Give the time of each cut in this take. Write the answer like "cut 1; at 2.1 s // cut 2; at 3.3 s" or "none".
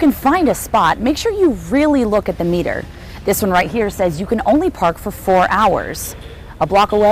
none